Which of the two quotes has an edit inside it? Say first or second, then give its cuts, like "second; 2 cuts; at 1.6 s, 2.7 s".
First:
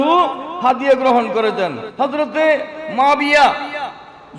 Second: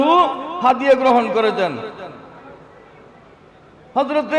first; 1 cut; at 1.8 s